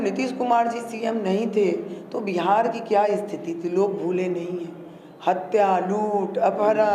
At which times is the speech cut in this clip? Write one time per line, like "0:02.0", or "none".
none